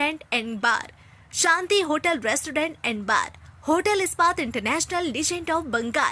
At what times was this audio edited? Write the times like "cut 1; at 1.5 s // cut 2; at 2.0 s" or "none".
none